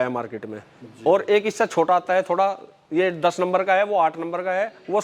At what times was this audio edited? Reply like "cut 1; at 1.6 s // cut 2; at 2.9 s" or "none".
none